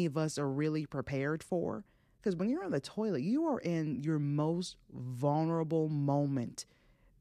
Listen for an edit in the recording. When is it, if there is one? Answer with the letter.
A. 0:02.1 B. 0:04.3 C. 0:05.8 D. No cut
D